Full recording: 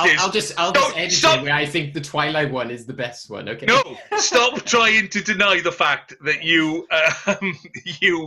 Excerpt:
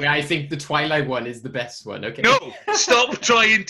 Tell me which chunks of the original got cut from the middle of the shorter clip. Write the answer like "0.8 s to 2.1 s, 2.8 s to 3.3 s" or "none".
none